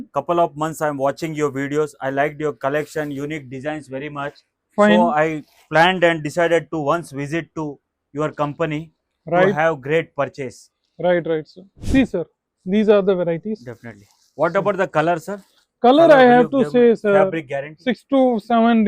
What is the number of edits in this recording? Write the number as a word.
one